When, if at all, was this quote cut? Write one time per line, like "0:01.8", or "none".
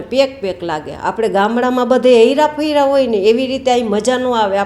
none

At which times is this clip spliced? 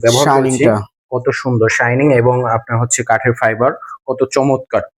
none

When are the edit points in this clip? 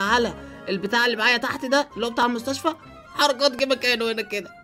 none

